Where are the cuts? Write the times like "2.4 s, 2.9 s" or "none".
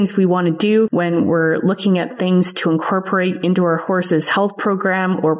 none